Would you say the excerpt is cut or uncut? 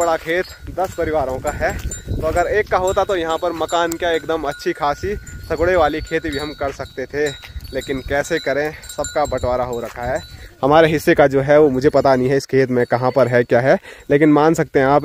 uncut